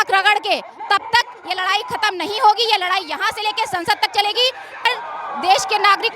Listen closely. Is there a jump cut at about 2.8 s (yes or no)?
no